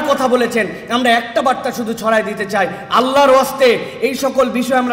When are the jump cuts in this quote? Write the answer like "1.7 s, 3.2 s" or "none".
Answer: none